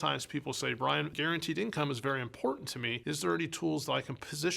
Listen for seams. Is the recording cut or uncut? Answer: cut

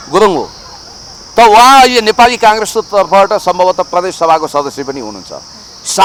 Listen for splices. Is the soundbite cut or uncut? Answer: uncut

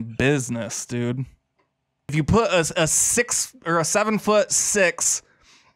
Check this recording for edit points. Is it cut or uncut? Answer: cut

